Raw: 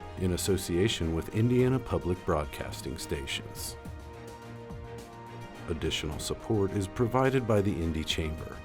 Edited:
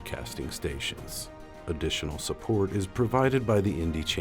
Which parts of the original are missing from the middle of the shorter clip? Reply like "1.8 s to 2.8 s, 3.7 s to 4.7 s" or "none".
4.0 s to 5.5 s